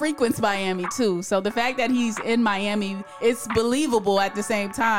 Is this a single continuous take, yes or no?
yes